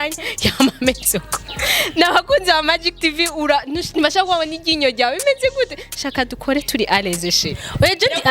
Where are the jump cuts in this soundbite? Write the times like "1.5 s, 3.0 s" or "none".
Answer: none